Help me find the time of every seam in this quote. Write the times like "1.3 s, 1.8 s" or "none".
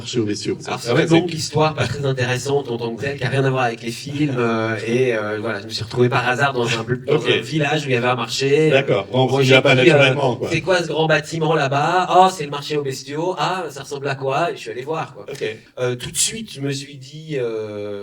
15.6 s